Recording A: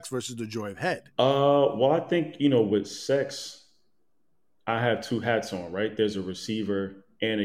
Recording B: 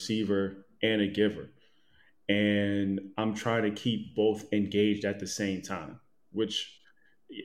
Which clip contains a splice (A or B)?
A